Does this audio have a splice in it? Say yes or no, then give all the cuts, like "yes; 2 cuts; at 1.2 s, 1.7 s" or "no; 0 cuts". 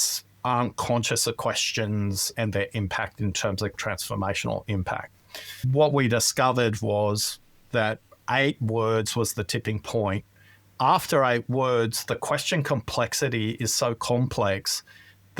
yes; 3 cuts; at 2.3 s, 3.7 s, 5.7 s